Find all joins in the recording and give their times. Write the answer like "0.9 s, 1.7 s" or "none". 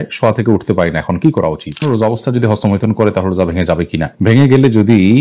1.8 s